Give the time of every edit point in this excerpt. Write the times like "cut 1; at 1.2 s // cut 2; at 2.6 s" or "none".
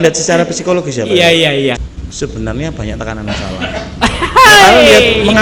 cut 1; at 1.8 s